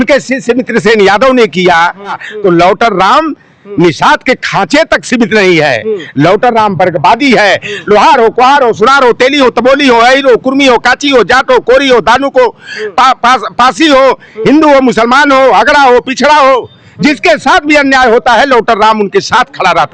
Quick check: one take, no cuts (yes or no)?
no